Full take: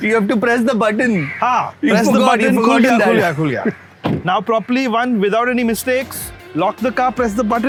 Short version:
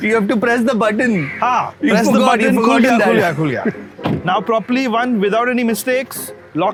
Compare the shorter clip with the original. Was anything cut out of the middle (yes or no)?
no